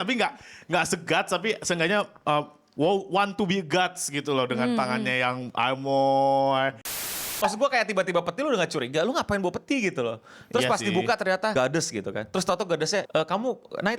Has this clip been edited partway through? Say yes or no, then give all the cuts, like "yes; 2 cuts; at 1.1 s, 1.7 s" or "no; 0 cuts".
yes; 3 cuts; at 7.3 s, 11.5 s, 13.1 s